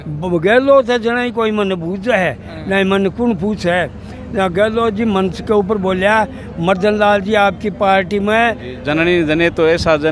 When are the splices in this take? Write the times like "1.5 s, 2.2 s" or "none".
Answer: 8.7 s